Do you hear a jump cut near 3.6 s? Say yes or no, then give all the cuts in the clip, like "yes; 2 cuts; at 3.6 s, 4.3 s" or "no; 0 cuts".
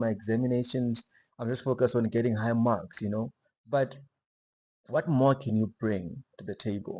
no; 0 cuts